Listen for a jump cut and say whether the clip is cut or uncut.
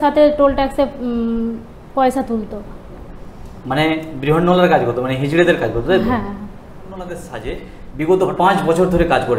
cut